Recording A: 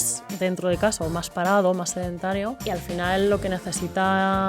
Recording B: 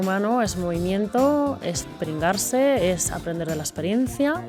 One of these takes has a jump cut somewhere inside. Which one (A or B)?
A